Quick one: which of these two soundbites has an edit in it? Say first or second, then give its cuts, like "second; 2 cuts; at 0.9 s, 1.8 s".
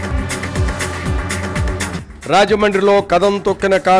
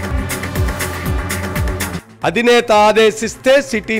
second; 1 cut; at 1.9 s